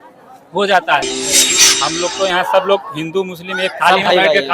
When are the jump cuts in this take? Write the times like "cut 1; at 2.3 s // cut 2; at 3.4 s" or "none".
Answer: cut 1; at 1.4 s